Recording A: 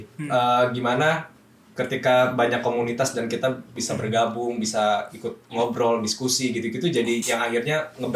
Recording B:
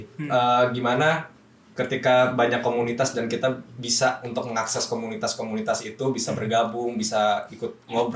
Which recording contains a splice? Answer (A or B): A